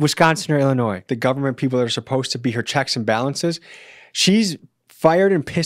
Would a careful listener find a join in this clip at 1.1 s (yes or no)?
yes